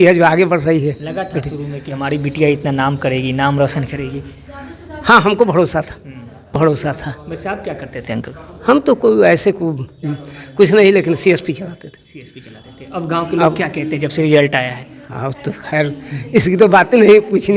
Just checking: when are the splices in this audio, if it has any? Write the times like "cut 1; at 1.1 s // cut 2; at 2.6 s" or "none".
none

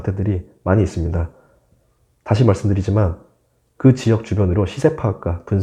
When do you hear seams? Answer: none

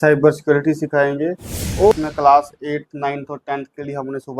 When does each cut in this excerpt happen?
cut 1; at 1.9 s

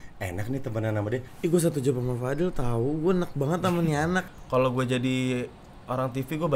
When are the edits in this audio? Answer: cut 1; at 1.2 s // cut 2; at 4.3 s

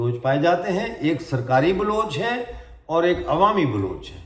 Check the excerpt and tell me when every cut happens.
none

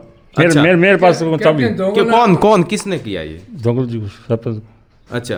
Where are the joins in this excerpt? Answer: none

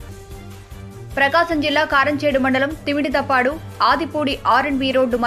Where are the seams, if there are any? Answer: none

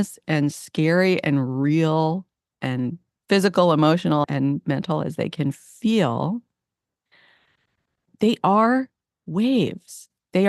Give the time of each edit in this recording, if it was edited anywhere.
cut 1; at 4.3 s // cut 2; at 8.1 s

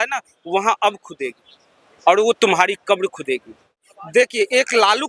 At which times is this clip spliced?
cut 1; at 3.7 s

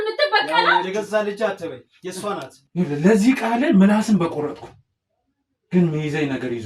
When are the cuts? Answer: cut 1; at 2.6 s

